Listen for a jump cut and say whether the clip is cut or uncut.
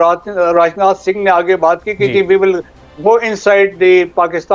uncut